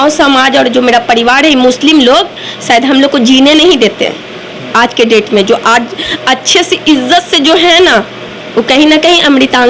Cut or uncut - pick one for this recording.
uncut